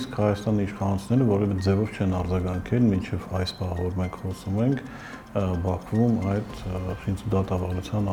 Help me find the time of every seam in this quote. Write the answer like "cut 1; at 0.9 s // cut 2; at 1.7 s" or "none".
none